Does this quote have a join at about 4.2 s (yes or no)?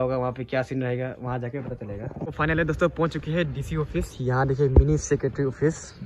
no